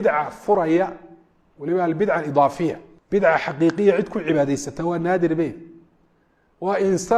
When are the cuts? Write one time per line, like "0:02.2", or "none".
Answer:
0:02.9